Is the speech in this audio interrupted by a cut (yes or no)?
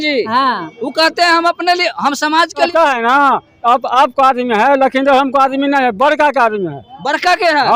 yes